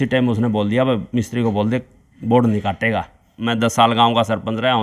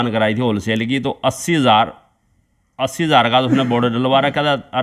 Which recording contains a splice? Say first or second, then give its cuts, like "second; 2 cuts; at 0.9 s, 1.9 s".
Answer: first; 1 cut; at 3.3 s